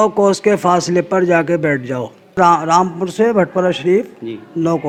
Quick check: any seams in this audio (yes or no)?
no